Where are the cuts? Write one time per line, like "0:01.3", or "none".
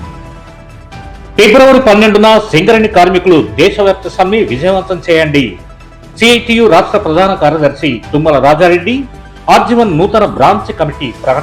0:01.0